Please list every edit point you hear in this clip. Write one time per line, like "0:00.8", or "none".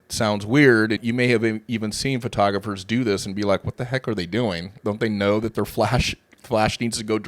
0:01.0
0:04.7